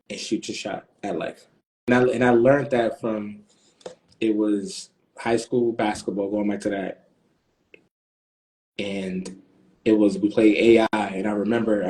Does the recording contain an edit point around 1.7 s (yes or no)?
yes